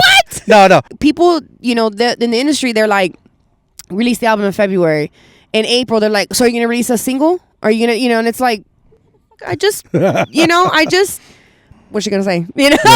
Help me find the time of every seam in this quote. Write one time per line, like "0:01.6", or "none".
0:00.9
0:11.7